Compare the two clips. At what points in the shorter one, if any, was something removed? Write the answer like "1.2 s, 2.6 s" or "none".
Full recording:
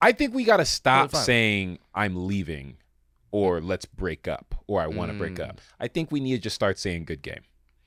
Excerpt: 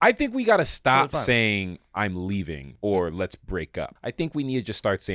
2.6 s, 4.0 s